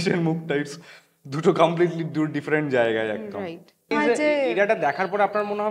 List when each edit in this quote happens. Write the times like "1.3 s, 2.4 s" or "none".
3.9 s